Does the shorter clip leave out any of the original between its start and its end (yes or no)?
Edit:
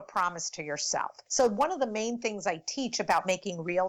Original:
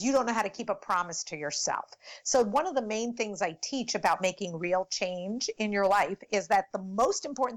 yes